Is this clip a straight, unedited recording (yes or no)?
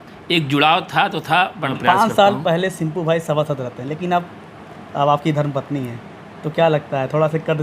no